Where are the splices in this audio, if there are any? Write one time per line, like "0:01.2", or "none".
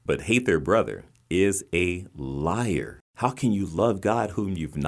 0:03.0

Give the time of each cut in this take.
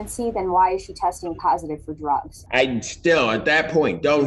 0:02.4

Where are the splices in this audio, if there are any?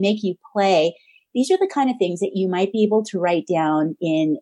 none

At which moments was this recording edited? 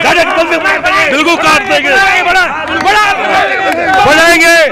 none

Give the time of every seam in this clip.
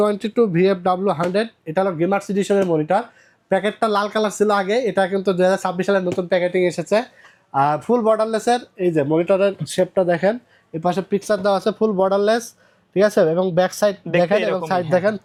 none

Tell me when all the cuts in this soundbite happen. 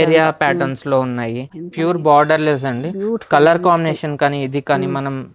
0:01.4

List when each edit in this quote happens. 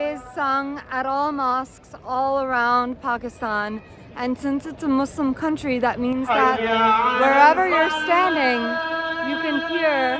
none

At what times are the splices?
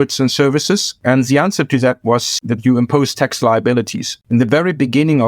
0:00.9
0:02.3
0:04.1

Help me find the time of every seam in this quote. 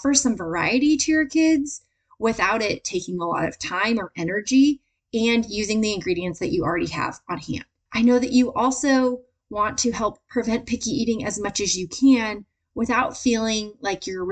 0:07.7

